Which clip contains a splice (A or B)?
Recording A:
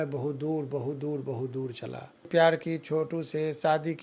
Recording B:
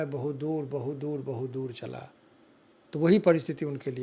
A